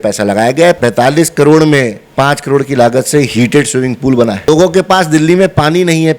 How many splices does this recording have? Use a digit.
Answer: 3